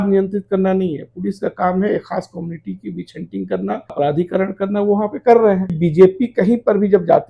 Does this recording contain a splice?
yes; 2 cuts; at 3.9 s, 5.8 s

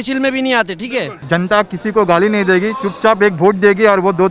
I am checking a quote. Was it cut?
yes; 1 cut; at 1.2 s

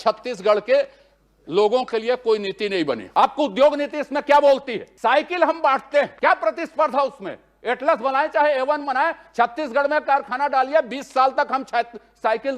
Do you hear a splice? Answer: yes; 3 cuts; at 3.0 s, 4.8 s, 6.1 s

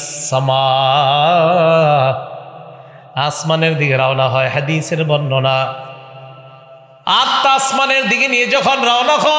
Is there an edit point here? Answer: no; 0 cuts

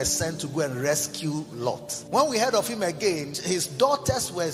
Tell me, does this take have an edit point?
yes; 2 cuts; at 1.9 s, 3.3 s

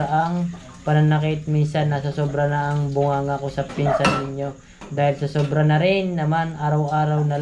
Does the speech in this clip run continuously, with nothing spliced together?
yes; 0 cuts

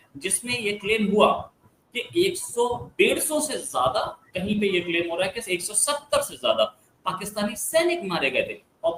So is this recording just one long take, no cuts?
yes; 0 cuts

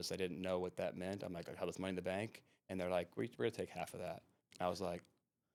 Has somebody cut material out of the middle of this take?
no; 0 cuts

